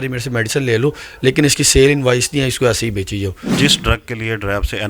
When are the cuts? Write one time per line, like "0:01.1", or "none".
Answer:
0:03.5